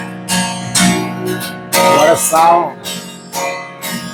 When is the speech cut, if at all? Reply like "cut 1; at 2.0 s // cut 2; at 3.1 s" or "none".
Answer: none